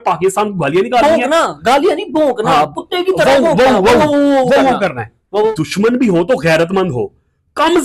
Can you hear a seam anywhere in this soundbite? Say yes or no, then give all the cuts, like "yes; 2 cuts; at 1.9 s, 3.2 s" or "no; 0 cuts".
yes; 1 cut; at 5.5 s